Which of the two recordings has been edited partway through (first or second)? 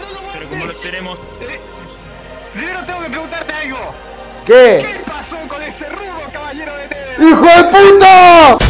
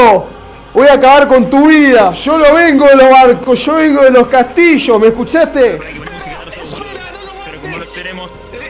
second